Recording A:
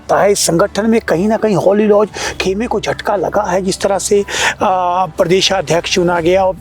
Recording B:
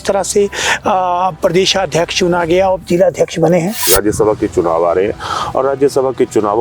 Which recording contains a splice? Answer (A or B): B